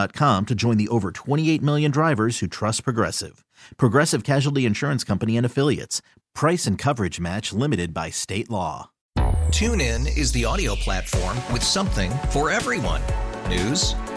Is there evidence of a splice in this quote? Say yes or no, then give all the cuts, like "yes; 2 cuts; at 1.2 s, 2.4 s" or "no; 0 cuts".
yes; 1 cut; at 8.9 s